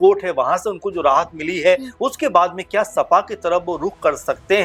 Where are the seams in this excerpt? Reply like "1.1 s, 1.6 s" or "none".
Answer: none